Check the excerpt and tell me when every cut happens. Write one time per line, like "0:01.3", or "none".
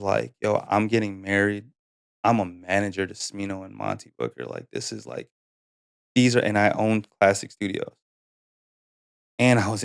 none